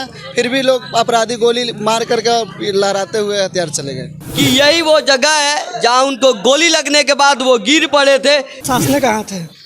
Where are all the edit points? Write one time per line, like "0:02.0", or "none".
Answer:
0:04.2
0:08.7

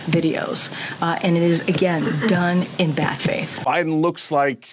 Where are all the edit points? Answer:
0:03.6

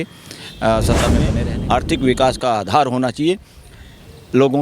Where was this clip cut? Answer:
0:01.4

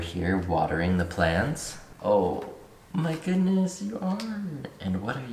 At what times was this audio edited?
none

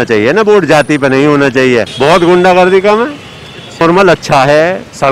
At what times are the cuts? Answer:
0:01.9
0:03.8

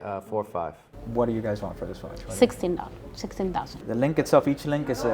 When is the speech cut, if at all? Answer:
0:00.8
0:03.7

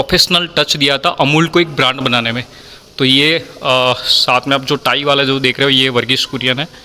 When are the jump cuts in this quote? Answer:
none

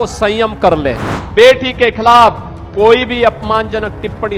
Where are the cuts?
0:01.1

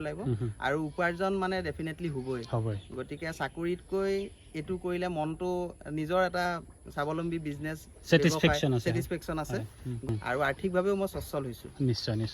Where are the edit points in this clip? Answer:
0:10.1

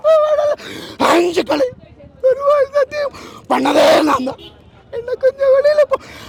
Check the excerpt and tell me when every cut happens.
none

